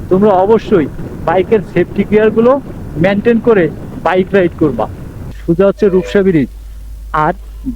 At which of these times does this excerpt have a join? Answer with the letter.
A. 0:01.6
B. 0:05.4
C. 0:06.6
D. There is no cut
B